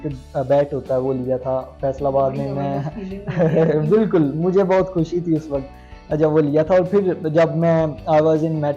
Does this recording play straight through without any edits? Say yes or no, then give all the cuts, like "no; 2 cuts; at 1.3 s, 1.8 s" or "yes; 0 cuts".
yes; 0 cuts